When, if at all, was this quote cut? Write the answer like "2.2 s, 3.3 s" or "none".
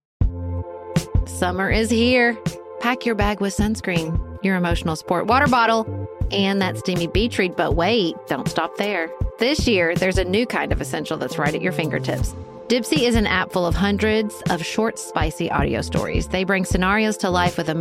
1.0 s